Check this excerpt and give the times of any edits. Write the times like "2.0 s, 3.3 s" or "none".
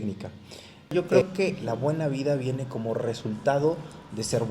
1.0 s